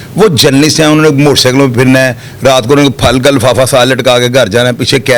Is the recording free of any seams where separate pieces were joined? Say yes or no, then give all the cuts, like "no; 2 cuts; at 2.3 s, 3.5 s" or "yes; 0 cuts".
yes; 0 cuts